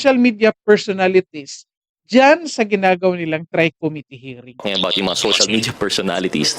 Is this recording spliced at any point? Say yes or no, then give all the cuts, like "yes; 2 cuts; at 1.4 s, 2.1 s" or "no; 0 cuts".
yes; 1 cut; at 4.6 s